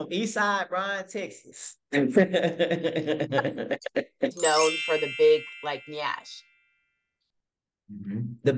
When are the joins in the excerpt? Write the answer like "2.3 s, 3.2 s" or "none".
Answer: 4.3 s